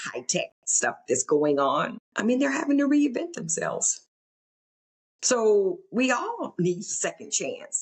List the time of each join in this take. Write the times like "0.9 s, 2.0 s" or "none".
2.0 s